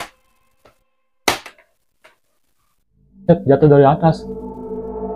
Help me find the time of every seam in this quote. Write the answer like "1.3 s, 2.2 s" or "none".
4.2 s